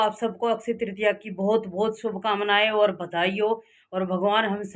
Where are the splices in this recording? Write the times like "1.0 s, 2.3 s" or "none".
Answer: none